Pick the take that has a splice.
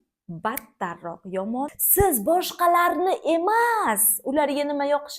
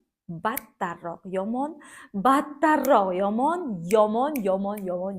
first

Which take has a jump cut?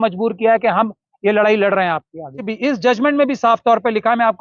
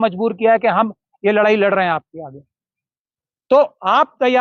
first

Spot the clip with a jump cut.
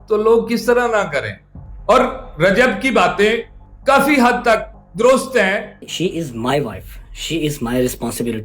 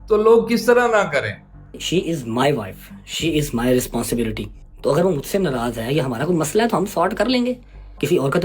second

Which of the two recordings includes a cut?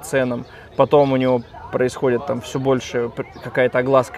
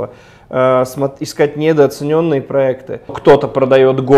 second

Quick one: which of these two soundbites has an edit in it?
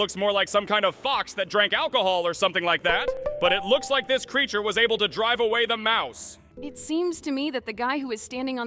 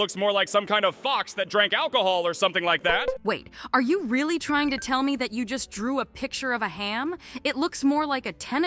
second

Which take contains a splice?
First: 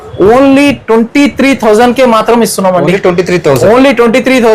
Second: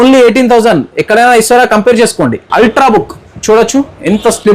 second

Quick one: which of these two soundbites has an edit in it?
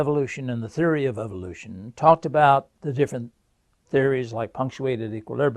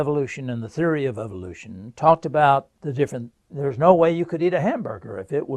first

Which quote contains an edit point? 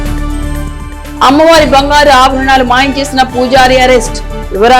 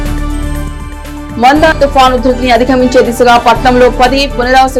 first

